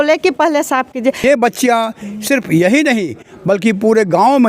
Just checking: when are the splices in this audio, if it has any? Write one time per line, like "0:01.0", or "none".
0:01.2